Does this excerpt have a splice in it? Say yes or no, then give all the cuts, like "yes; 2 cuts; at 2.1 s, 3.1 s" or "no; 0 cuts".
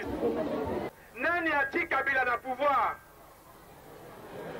yes; 1 cut; at 1.0 s